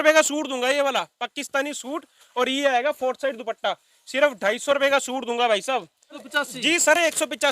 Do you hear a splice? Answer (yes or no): yes